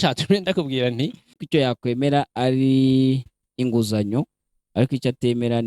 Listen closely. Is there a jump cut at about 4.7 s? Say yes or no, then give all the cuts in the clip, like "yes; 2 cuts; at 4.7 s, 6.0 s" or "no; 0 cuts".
no; 1 cut; at 1.4 s